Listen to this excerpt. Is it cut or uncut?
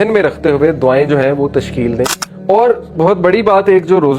cut